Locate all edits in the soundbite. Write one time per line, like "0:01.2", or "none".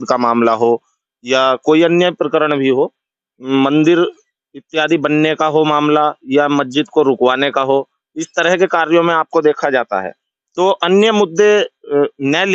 none